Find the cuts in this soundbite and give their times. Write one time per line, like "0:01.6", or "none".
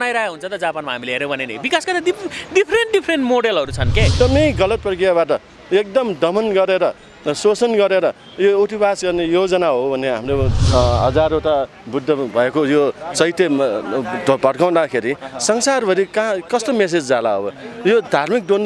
0:04.1
0:10.6

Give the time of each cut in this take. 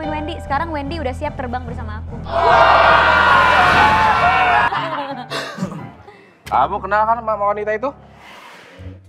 0:04.7

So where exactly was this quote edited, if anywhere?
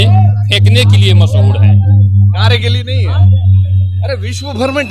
none

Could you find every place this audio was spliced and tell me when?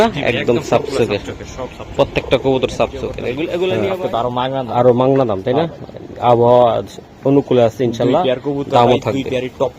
0:03.7

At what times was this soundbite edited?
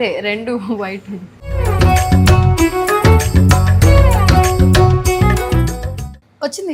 none

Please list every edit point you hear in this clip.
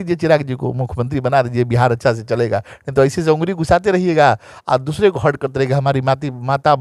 none

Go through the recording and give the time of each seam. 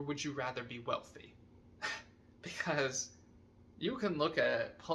none

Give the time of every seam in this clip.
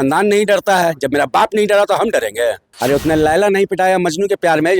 0:02.7

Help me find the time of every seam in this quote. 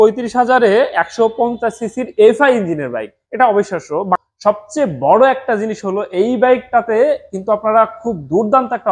0:04.2

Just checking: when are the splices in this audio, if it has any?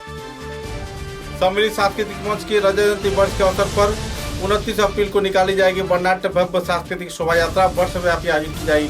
0:01.2

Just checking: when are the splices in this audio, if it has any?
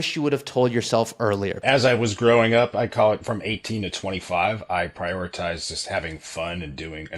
0:01.6

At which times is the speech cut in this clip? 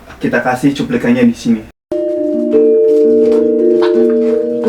0:01.8

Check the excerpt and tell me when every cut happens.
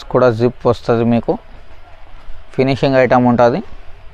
none

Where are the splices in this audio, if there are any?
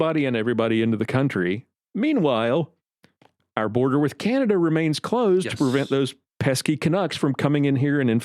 0:01.7

